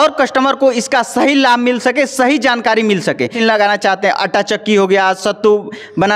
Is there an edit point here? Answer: yes; 1 cut; at 3.4 s

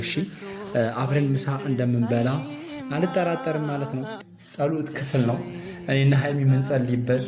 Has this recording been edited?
yes; 1 cut; at 4.1 s

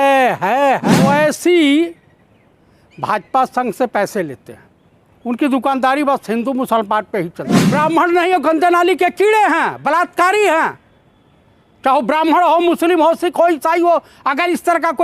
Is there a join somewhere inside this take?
yes; 2 cuts; at 0.9 s, 7.7 s

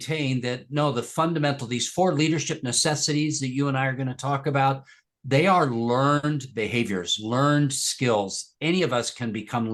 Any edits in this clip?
no; 0 cuts

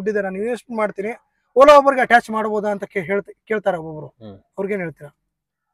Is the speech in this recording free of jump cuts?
yes; 0 cuts

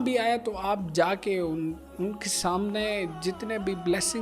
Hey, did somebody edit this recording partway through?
no; 0 cuts

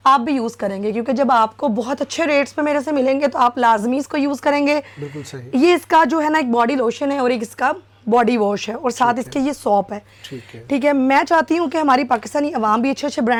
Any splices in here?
no; 0 cuts

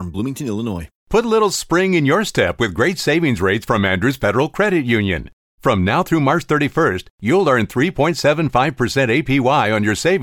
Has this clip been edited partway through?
yes; 1 cut; at 0.9 s

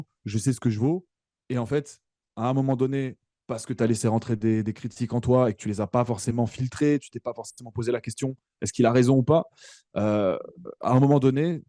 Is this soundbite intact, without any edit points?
yes; 0 cuts

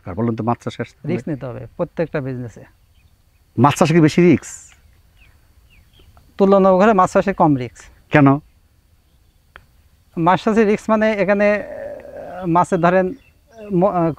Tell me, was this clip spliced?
no; 0 cuts

